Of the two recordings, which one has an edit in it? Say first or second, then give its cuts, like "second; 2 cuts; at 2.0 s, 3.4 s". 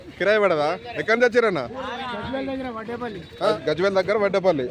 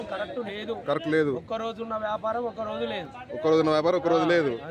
first; 1 cut; at 3.5 s